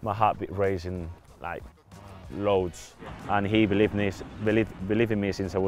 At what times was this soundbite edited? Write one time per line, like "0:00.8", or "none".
0:03.2